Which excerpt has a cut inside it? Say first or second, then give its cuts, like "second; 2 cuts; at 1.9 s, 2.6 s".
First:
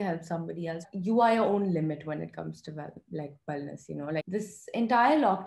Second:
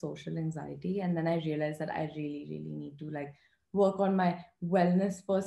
first; 2 cuts; at 0.8 s, 4.2 s